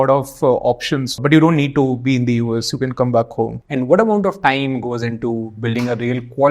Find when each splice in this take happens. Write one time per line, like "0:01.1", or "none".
0:01.1
0:03.6